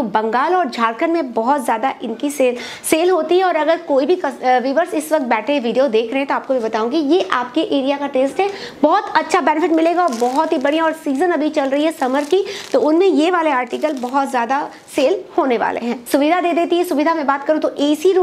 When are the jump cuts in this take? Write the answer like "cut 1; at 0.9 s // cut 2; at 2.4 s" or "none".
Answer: cut 1; at 16.0 s